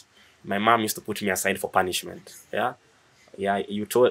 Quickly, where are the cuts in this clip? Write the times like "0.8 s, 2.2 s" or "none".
none